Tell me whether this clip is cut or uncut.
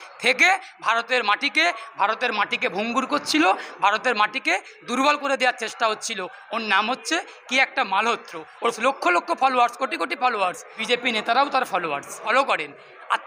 cut